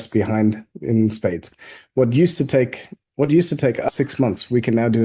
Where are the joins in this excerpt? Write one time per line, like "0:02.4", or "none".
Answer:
0:03.9